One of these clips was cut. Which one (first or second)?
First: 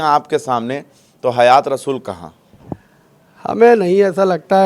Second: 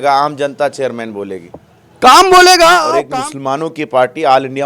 second